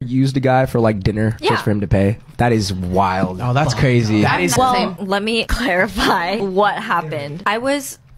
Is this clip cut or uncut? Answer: cut